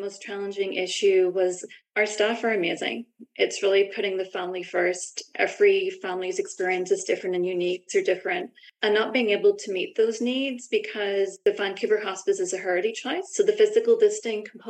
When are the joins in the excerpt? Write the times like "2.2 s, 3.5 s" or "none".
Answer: 11.4 s, 13.2 s